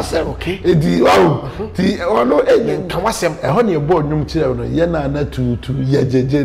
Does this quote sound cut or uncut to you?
uncut